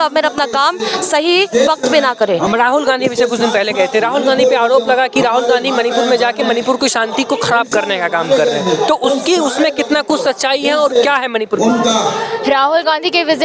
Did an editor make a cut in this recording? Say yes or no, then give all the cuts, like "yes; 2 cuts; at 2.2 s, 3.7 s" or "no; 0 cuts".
no; 0 cuts